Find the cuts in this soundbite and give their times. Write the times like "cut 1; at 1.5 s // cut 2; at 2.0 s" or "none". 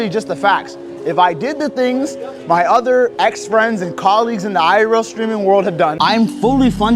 cut 1; at 6.0 s